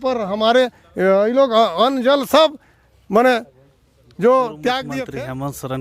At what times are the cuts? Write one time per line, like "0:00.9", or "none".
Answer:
0:04.9